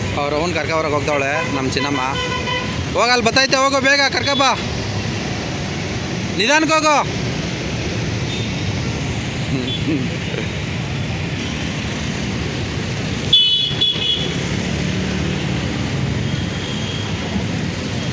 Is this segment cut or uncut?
uncut